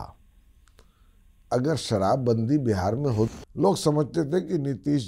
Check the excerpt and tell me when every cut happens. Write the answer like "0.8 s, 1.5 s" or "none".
3.3 s